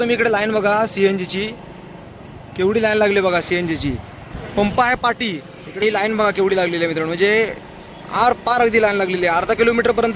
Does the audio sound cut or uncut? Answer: cut